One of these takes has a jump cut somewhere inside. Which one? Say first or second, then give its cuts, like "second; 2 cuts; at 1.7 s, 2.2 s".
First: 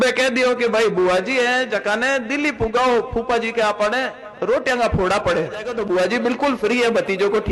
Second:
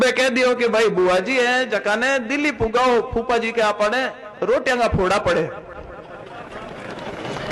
first; 1 cut; at 5.7 s